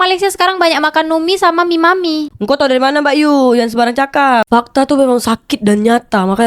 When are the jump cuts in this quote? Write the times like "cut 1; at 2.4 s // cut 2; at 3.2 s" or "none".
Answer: cut 1; at 4.5 s

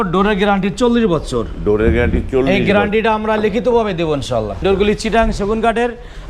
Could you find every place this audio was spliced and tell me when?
cut 1; at 4.6 s

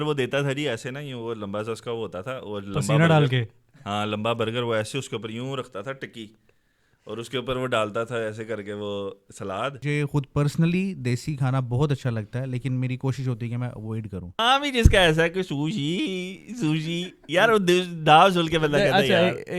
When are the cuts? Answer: cut 1; at 9.8 s // cut 2; at 14.4 s

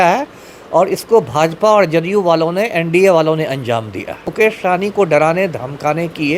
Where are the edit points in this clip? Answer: cut 1; at 4.3 s

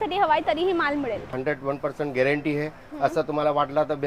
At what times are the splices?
cut 1; at 1.4 s

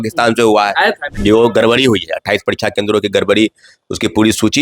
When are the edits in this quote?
cut 1; at 1.1 s

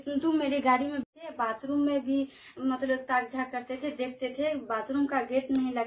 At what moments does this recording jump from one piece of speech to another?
cut 1; at 1.0 s

